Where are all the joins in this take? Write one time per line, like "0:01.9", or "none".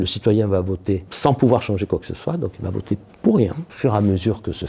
0:01.1
0:03.7